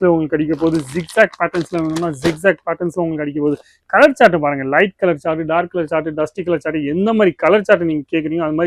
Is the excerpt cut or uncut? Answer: uncut